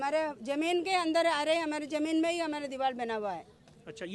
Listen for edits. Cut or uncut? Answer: uncut